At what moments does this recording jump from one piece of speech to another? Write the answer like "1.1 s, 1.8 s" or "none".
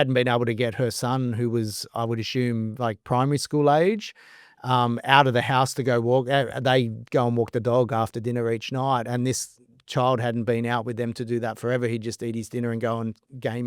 none